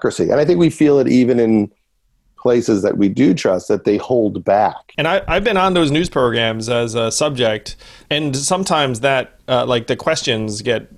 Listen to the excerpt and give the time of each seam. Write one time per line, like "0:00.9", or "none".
0:04.8
0:08.0